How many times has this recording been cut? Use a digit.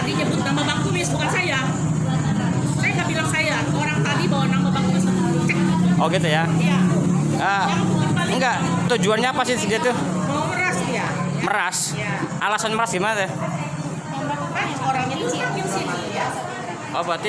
0